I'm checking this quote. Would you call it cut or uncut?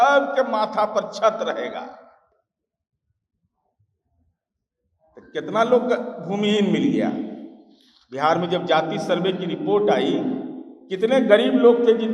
uncut